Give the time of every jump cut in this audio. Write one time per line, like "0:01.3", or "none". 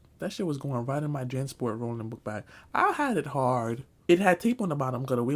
0:03.9

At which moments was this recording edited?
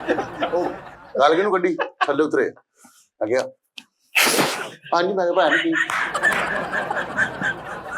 0:00.9

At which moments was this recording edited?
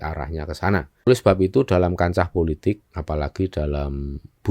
0:01.1

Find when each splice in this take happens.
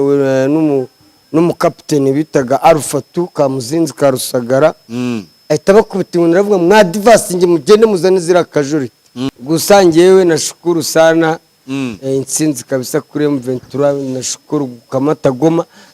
0:09.1

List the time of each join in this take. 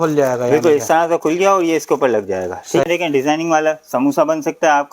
0:02.8

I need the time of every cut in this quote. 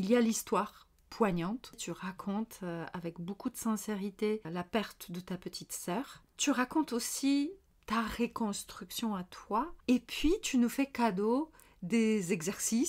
0:06.2
0:07.7

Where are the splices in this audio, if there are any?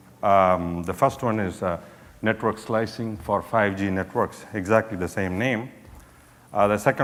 none

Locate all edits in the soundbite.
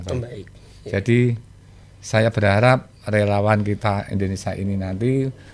none

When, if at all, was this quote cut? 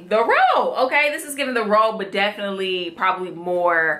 none

